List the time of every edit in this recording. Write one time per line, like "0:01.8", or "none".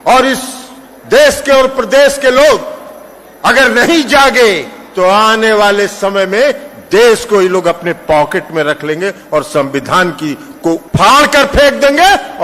0:10.8